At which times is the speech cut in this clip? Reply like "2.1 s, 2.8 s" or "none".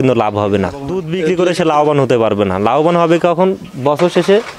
1.1 s